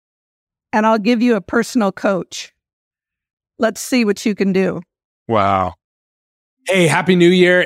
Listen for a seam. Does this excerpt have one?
no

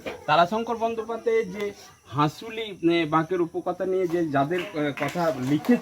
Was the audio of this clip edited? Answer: no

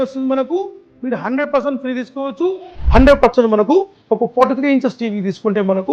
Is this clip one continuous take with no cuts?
no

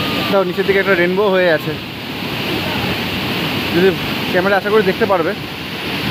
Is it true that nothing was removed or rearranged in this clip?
yes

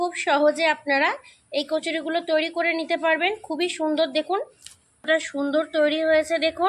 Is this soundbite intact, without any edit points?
no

